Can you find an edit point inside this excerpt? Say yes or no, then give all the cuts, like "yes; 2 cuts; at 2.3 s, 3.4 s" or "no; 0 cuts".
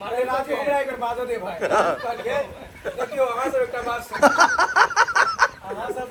no; 0 cuts